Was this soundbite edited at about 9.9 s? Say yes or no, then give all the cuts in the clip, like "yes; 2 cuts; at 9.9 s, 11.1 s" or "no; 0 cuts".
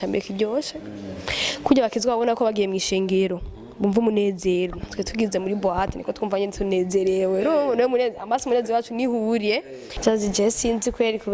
yes; 1 cut; at 9.9 s